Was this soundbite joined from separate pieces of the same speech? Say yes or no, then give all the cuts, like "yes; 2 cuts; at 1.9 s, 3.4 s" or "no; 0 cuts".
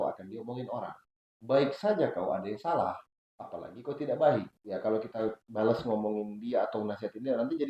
yes; 1 cut; at 4.6 s